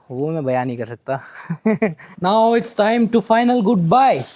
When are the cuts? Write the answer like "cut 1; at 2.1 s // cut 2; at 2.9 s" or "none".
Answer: cut 1; at 2.1 s